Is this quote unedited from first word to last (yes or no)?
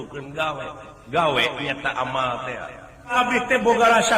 no